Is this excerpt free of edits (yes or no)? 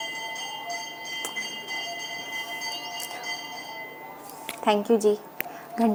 yes